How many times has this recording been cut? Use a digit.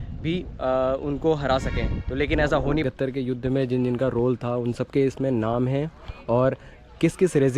1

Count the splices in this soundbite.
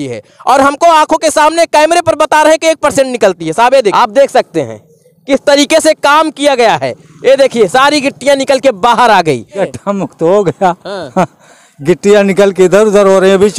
2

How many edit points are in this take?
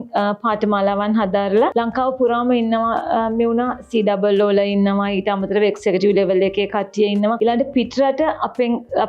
2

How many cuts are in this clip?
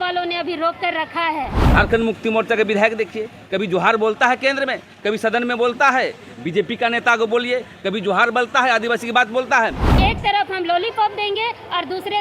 2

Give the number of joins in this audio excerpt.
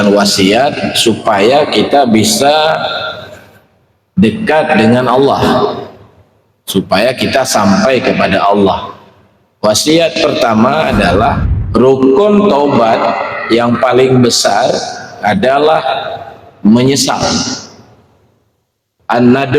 1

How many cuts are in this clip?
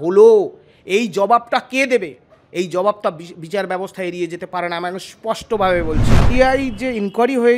1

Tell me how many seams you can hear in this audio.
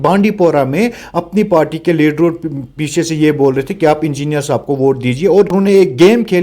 1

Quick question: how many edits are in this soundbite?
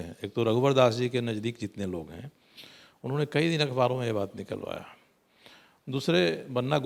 0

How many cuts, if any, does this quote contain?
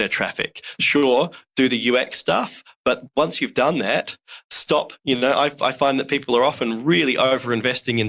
0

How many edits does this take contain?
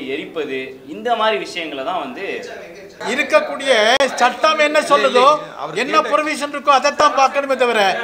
1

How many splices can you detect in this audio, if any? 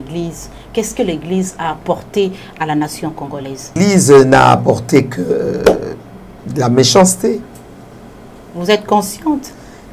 1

